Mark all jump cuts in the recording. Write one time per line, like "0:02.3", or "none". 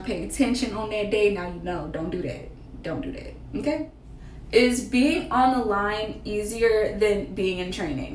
0:04.0